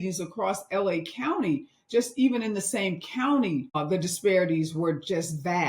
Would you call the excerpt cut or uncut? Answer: cut